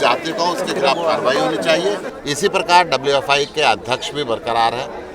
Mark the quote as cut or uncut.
cut